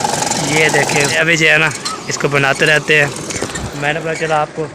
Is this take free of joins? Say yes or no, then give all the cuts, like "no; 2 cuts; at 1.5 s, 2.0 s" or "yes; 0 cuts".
no; 1 cut; at 1.1 s